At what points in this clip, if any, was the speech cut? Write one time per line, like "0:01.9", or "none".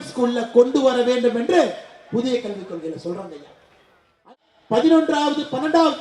0:04.2